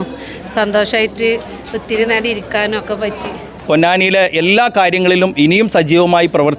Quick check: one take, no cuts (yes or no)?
no